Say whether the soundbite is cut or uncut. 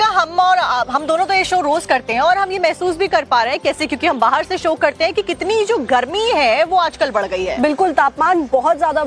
uncut